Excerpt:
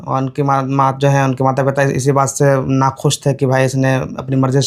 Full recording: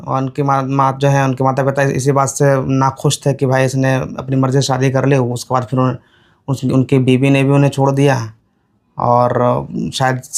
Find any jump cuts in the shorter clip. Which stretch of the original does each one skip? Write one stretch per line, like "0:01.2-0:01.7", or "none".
none